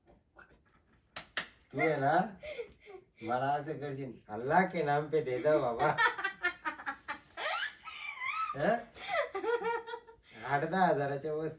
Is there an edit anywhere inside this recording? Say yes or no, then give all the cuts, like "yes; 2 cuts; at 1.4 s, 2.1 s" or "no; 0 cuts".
no; 0 cuts